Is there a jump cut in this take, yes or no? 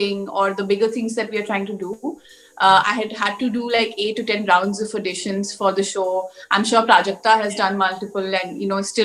no